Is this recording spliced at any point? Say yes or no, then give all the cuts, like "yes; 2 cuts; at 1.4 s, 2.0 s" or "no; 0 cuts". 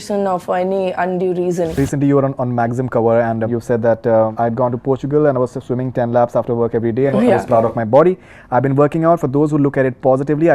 yes; 3 cuts; at 1.8 s, 3.5 s, 4.3 s